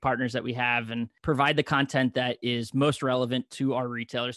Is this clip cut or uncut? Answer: cut